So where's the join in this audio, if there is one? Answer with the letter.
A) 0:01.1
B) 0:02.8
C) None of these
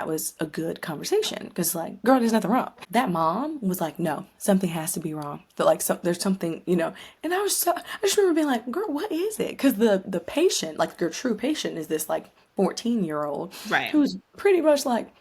B